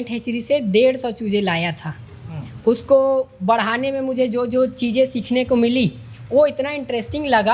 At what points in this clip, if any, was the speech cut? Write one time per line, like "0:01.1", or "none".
none